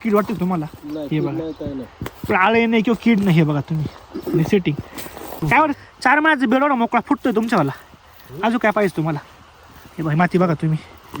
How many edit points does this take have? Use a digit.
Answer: 1